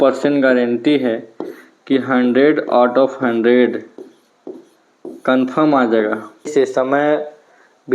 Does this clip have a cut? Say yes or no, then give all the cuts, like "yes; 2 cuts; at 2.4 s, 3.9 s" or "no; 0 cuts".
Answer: yes; 1 cut; at 6.5 s